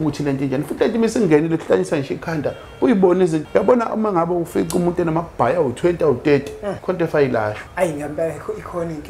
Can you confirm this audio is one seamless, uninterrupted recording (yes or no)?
no